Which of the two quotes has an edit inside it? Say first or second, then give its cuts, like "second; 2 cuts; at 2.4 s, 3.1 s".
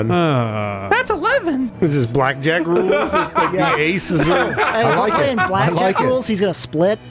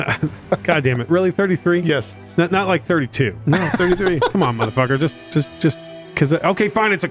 first; 1 cut; at 1.7 s